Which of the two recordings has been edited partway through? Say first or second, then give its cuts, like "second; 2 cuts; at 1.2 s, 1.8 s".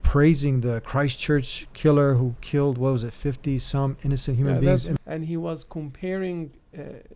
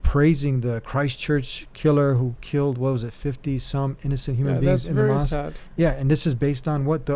first; 1 cut; at 4.9 s